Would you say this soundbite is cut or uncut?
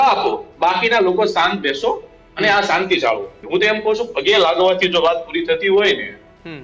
cut